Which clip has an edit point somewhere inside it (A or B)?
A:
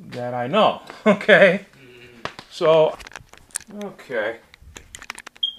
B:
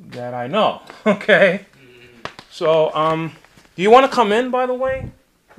B